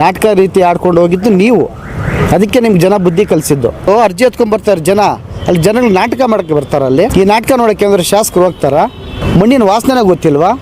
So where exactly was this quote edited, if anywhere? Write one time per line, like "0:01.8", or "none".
0:03.9
0:07.1
0:09.2